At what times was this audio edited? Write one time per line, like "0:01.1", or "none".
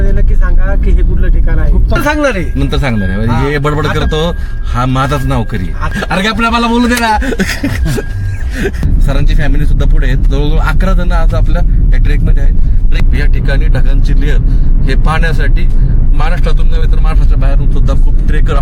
0:02.0
0:05.9
0:08.8
0:13.0